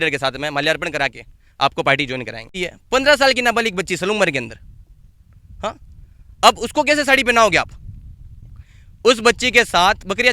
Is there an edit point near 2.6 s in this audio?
yes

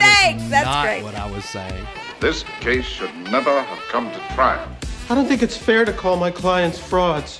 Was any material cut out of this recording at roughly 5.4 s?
no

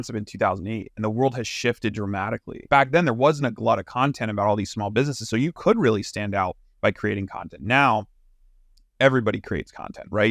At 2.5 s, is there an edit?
yes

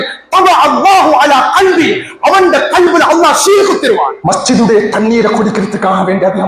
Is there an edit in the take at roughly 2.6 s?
no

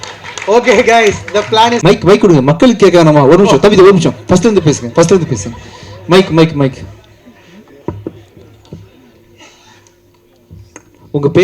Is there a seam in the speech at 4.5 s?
no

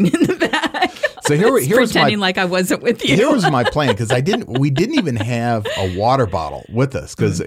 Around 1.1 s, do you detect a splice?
no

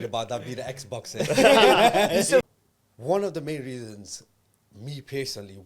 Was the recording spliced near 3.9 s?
no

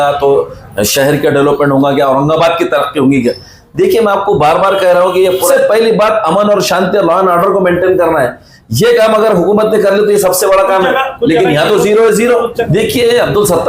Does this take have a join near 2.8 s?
no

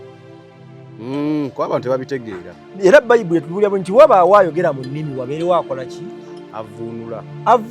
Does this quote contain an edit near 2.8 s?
no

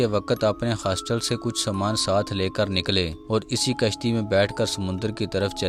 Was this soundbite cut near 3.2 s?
no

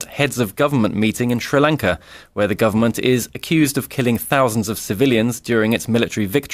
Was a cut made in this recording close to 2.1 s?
yes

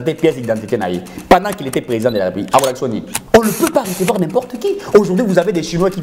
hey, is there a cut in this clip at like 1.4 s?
no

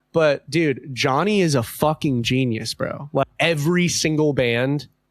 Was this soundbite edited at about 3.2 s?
yes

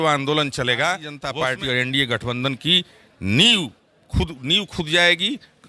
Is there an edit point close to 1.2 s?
yes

